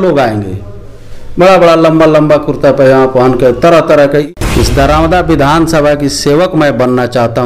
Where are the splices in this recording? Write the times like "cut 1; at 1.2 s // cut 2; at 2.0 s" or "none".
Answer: cut 1; at 4.3 s